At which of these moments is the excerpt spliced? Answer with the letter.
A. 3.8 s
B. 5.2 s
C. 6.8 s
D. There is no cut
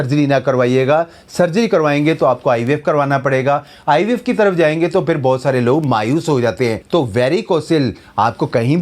C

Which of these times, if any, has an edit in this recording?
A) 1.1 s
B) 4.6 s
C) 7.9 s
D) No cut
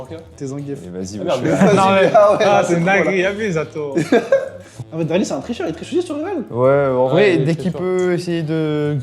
B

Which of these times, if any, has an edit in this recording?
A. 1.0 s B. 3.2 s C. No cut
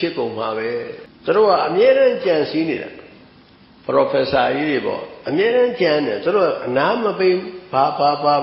A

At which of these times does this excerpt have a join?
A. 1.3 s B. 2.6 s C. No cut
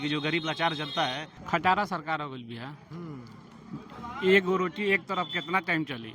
A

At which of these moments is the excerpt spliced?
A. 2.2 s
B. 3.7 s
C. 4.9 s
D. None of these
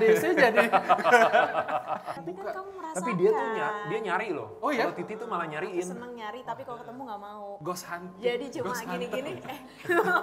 A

